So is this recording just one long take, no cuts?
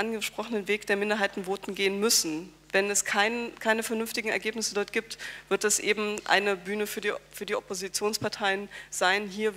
yes; 0 cuts

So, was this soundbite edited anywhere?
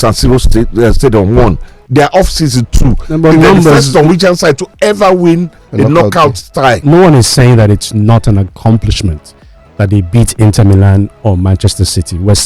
yes; 2 cuts; at 5.6 s, 6.8 s

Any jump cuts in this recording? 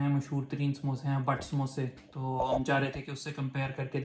no; 0 cuts

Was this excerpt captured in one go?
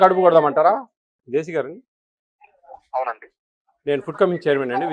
no; 1 cut; at 1.2 s

